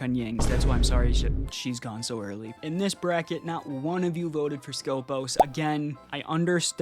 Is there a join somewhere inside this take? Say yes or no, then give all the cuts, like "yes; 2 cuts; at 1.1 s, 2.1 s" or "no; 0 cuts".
yes; 1 cut; at 2.5 s